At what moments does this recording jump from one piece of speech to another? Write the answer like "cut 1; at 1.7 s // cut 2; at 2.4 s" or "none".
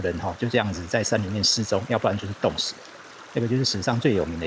none